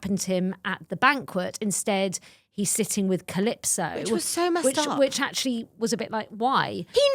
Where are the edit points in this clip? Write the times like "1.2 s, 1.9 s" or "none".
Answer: none